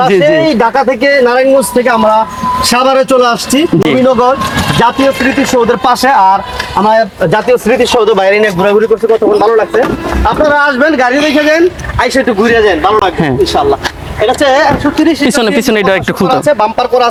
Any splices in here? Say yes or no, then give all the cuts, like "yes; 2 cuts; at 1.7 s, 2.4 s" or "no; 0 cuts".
no; 0 cuts